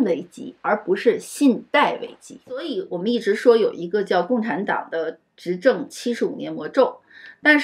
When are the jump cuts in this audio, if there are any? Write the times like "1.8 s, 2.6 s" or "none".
2.8 s